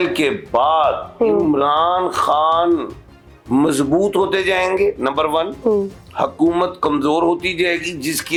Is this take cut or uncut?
uncut